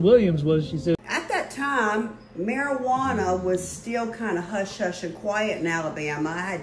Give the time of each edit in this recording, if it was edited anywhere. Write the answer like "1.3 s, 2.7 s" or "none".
0.9 s